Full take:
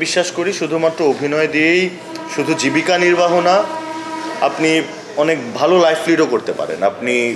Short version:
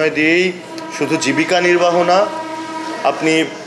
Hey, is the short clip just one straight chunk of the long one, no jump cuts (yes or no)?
yes